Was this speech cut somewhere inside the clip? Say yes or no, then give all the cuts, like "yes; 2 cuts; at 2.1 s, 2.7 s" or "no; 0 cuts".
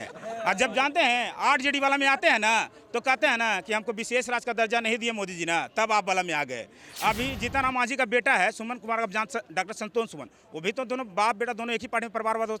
yes; 1 cut; at 6.8 s